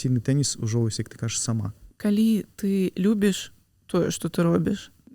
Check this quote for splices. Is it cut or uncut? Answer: cut